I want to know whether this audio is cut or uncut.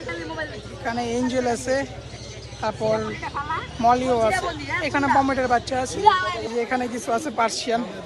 cut